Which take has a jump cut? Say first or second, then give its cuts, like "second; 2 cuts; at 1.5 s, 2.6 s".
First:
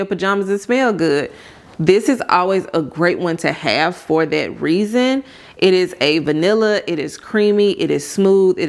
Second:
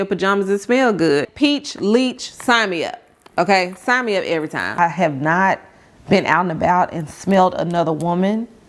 second; 2 cuts; at 1.3 s, 4.8 s